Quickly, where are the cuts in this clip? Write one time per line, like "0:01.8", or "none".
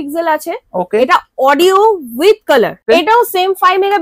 0:02.8